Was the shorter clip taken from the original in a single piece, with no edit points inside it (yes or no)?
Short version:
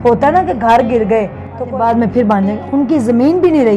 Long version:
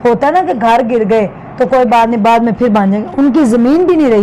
no